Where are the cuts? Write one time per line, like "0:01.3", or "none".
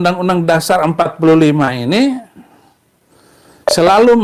none